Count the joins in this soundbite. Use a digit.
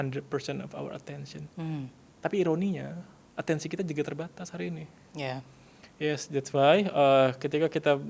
1